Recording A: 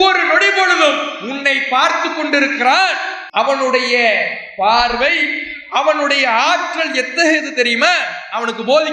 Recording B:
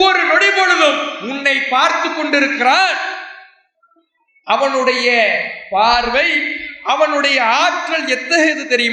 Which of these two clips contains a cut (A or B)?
A